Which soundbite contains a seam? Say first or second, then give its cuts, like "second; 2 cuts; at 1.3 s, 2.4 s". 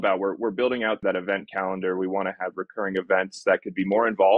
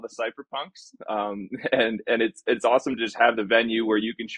first; 1 cut; at 1.0 s